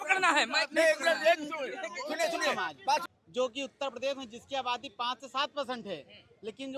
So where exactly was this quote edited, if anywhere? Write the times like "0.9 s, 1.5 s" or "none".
3.1 s